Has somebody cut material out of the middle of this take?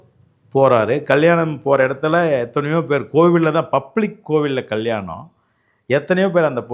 no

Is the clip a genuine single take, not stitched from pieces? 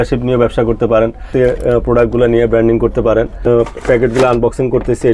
no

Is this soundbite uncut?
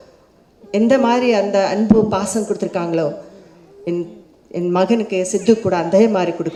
yes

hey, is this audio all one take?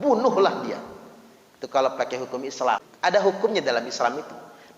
no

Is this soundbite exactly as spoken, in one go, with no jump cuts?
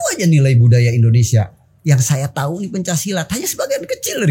yes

